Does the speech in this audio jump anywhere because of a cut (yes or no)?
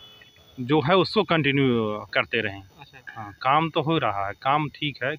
no